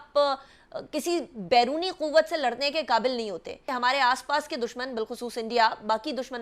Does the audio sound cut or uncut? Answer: cut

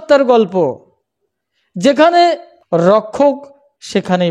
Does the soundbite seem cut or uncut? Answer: cut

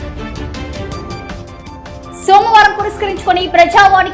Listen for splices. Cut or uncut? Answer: cut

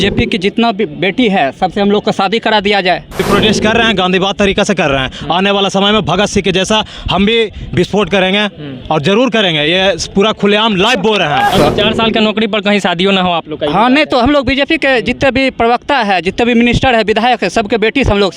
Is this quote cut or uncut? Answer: cut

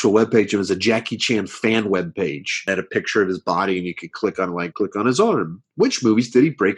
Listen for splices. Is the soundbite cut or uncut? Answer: cut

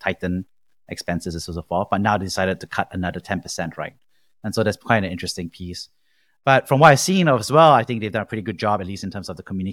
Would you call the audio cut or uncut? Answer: uncut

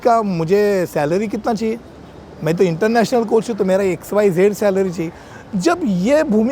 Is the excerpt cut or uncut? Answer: uncut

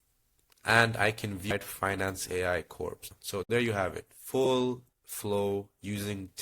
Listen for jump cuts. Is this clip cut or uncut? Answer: cut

